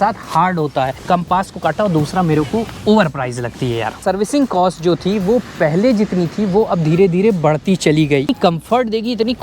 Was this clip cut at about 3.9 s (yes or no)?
yes